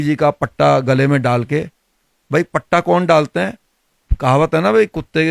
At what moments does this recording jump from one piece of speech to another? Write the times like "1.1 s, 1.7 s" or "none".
none